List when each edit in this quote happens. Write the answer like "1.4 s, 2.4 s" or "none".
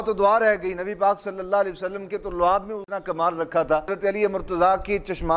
3.9 s